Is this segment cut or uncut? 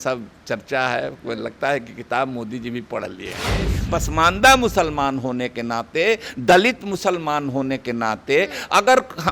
cut